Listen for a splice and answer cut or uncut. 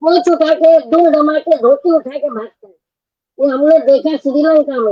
uncut